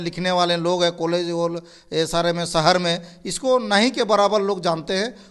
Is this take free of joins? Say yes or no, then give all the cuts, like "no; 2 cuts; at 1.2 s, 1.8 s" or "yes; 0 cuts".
yes; 0 cuts